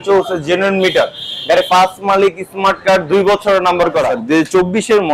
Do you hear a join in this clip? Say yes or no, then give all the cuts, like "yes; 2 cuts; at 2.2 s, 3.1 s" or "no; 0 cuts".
yes; 1 cut; at 4.2 s